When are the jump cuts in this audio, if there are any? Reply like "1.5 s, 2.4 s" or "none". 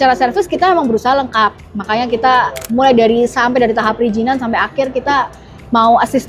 none